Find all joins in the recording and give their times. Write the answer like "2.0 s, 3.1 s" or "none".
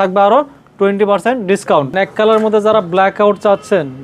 1.9 s